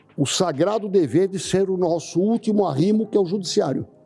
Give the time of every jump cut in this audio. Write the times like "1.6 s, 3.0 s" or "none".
none